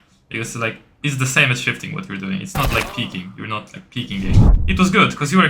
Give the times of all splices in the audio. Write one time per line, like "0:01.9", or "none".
0:04.5